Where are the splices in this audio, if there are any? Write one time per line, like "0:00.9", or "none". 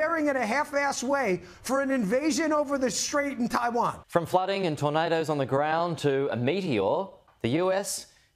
0:04.0

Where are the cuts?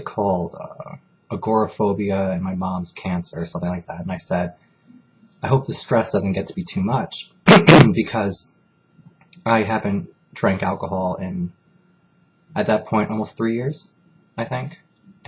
0:08.2

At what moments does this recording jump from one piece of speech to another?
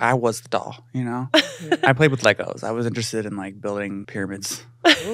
0:04.1

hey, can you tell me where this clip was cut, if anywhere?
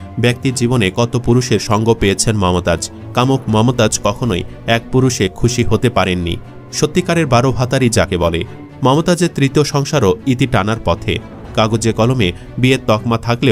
0:03.0
0:08.6

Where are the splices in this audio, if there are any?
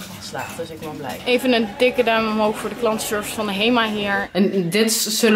0:01.2
0:04.2

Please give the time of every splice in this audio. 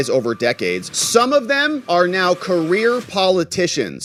none

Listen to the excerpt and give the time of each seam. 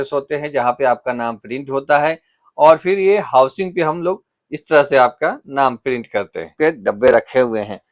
0:06.5

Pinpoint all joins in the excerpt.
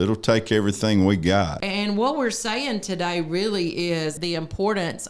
0:01.6
0:04.2

